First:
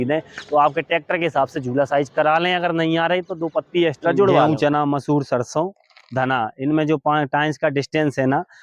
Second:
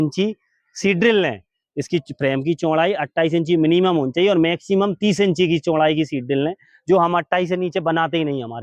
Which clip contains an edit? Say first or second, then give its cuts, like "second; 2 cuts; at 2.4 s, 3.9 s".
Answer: first; 1 cut; at 4.5 s